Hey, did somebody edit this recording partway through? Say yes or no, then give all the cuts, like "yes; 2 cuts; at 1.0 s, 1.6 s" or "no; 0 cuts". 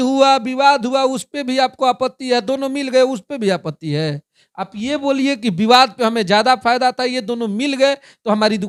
no; 0 cuts